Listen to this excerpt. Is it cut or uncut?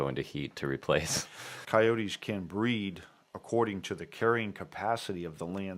cut